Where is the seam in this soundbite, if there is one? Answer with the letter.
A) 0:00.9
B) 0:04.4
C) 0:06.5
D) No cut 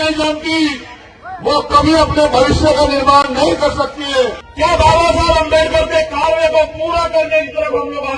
B